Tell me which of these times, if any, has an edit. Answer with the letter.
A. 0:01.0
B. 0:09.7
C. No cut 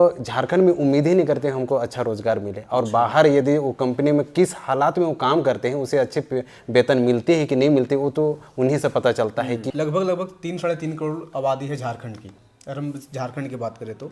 B